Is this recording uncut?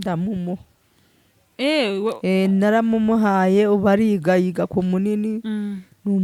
yes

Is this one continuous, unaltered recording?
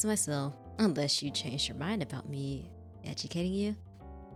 yes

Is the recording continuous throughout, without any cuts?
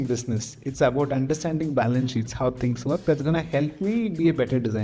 yes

